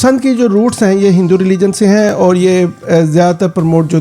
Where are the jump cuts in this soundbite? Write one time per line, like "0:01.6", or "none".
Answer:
none

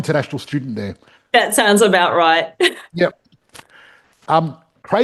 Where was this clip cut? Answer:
none

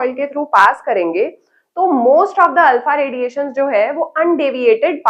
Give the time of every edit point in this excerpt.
none

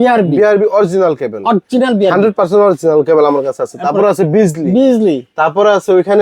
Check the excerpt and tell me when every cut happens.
none

